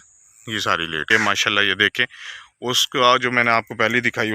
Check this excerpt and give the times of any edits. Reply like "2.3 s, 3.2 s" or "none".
1.1 s

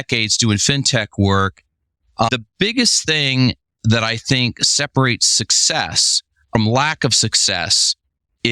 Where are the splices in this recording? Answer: 2.3 s, 6.5 s

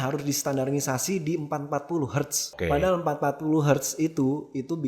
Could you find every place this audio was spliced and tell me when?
2.5 s

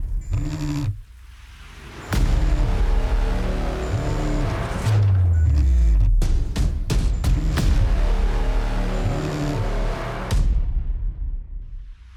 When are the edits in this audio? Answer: none

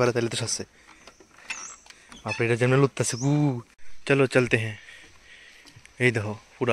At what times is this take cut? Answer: 3.9 s

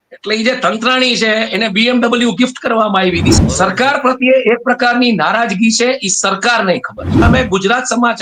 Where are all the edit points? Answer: 3.3 s, 7.2 s

